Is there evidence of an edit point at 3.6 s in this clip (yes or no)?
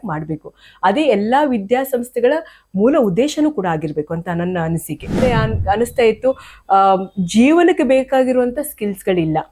no